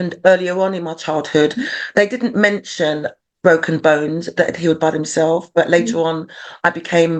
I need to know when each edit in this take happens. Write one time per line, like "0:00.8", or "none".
none

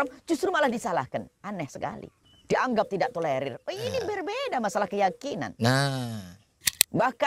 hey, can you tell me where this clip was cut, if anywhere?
0:02.1

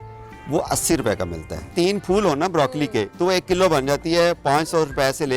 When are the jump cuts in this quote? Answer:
0:01.7

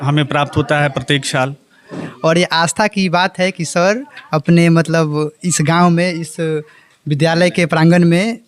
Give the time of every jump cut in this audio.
0:02.1

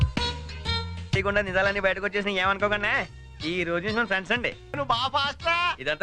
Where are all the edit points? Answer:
0:01.2
0:04.8

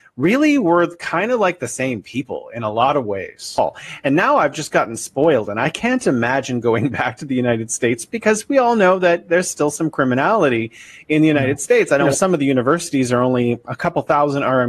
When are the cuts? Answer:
0:03.6
0:12.1

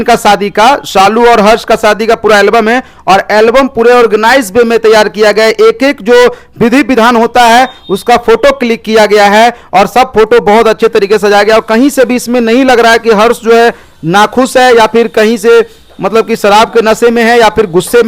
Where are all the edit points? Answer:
none

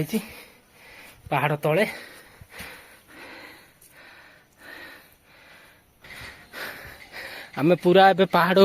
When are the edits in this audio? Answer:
0:06.0

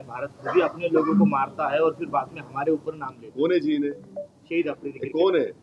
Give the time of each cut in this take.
none

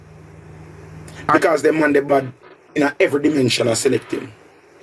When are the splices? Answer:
0:01.3

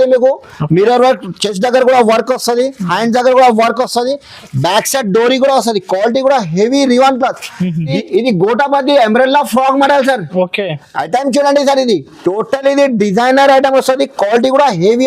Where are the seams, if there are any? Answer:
0:07.8

